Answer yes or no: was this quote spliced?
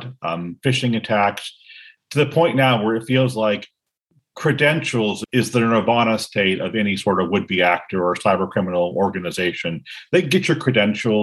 no